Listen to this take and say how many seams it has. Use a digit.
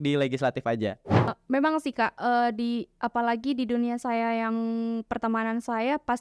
1